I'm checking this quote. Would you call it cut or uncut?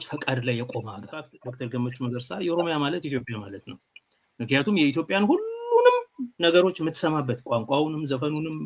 cut